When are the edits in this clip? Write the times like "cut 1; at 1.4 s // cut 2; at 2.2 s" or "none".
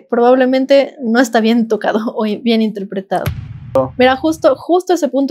cut 1; at 3.2 s

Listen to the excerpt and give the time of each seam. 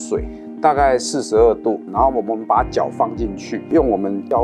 cut 1; at 1.8 s

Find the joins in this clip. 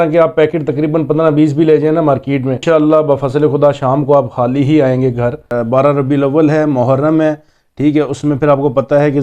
cut 1; at 2.6 s // cut 2; at 5.5 s

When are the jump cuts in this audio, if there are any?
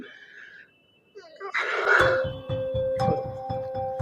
cut 1; at 1.9 s

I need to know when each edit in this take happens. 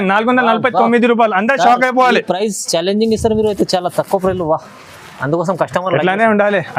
none

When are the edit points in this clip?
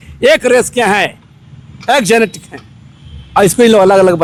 none

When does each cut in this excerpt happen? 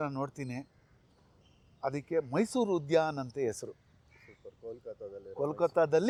none

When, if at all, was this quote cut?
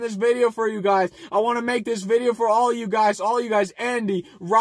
cut 1; at 1.2 s

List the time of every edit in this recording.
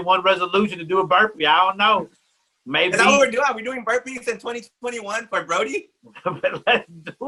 none

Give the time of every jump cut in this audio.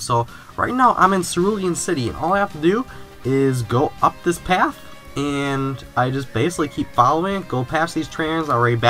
none

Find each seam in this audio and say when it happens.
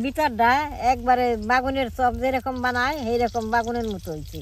none

